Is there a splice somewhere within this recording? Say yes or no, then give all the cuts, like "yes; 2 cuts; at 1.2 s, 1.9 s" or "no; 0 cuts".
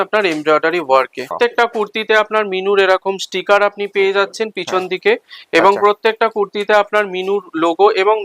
yes; 1 cut; at 1.3 s